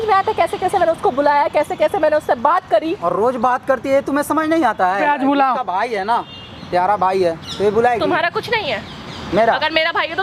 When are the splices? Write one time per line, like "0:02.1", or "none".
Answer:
0:05.0